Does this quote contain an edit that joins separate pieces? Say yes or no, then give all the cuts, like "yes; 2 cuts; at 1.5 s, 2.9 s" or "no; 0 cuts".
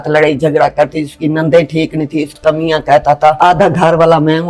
yes; 2 cuts; at 2.4 s, 3.4 s